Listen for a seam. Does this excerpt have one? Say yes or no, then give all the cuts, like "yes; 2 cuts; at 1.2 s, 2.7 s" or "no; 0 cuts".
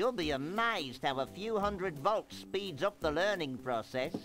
no; 0 cuts